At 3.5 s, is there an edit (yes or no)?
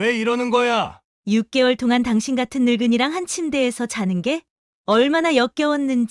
no